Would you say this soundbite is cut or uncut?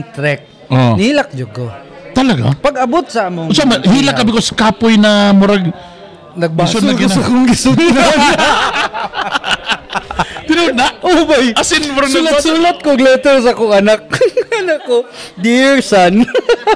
uncut